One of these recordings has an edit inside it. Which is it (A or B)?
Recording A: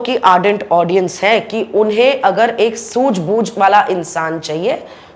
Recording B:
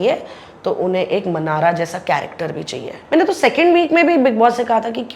B